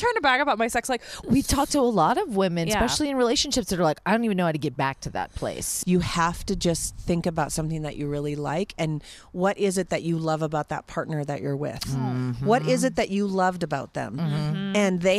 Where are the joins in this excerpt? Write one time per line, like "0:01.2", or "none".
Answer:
0:01.1
0:05.7